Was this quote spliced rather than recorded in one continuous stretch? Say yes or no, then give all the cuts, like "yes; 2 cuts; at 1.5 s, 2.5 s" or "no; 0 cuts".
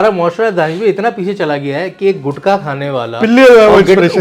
no; 0 cuts